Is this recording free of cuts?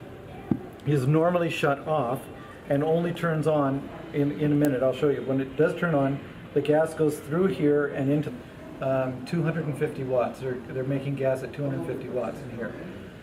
yes; 0 cuts

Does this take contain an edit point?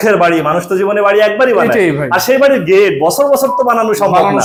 no; 0 cuts

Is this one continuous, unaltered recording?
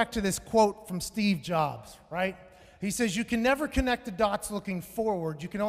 yes; 0 cuts

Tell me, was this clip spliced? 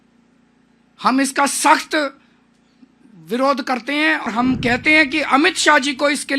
yes; 1 cut; at 4.3 s

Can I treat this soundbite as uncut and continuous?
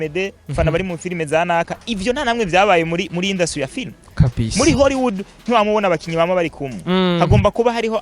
yes; 0 cuts

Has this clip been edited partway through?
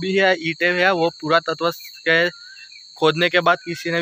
no; 0 cuts

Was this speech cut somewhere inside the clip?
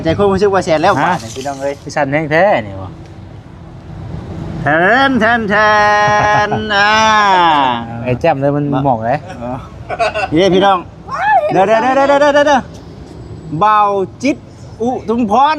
yes; 1 cut; at 8.1 s

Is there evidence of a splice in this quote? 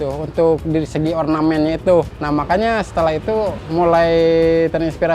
yes; 2 cuts; at 2.2 s, 3.6 s

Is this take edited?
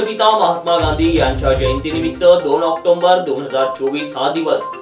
no; 0 cuts

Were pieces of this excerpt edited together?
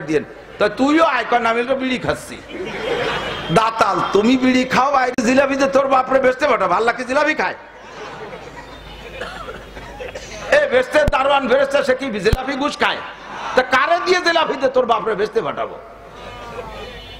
no; 0 cuts

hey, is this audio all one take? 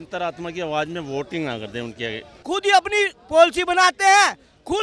no; 1 cut; at 2.4 s

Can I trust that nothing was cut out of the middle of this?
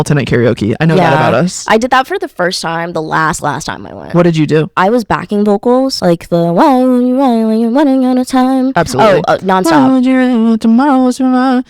no; 3 cuts; at 3.9 s, 4.8 s, 6.0 s

